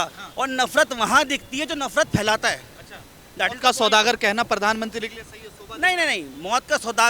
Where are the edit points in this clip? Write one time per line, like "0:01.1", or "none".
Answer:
none